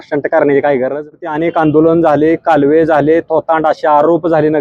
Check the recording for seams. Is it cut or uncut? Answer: cut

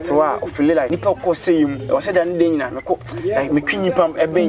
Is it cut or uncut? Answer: cut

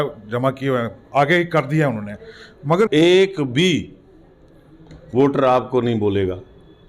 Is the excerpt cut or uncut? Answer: cut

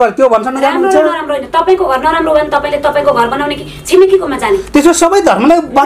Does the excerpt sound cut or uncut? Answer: uncut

